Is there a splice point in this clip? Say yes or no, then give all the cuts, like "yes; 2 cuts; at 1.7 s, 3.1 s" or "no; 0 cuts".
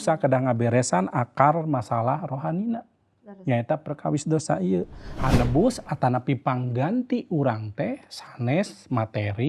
yes; 1 cut; at 5.0 s